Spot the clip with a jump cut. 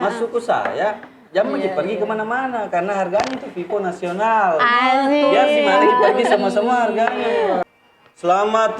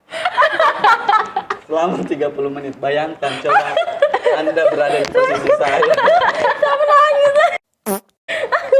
first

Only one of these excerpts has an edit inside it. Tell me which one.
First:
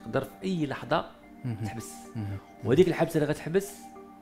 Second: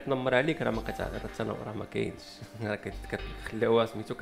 first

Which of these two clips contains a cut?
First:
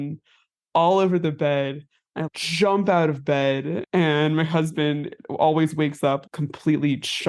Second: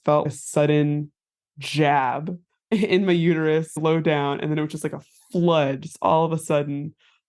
first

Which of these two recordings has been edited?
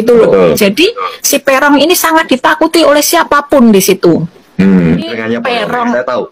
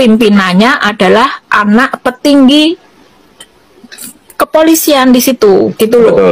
first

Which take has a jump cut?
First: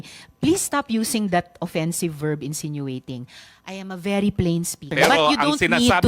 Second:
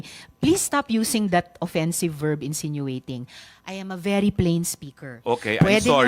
first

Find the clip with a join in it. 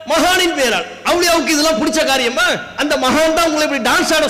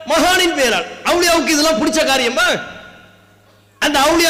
first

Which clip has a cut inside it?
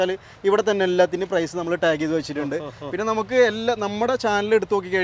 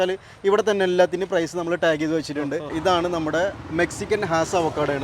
second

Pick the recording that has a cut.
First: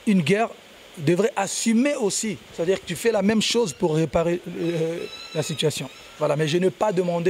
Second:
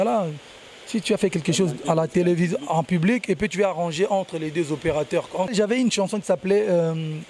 second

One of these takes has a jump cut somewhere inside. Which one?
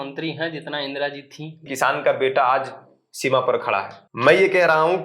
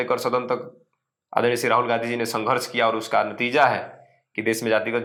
first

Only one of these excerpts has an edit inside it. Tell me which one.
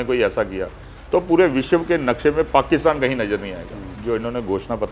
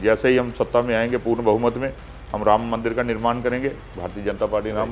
first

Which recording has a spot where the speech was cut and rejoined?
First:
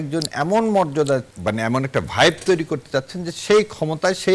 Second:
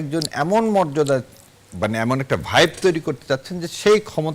first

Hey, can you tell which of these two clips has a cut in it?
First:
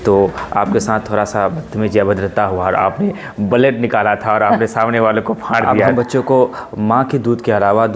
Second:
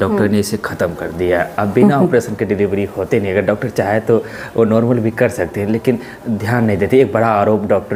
first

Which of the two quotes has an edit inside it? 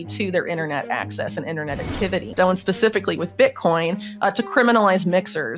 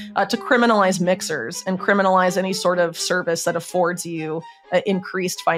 first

